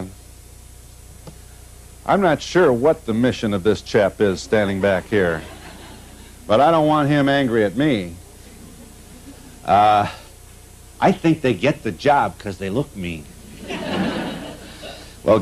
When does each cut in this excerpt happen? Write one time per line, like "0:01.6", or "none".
none